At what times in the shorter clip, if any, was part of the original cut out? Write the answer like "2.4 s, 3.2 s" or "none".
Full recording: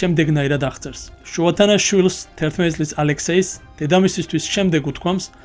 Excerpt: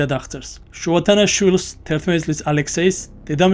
none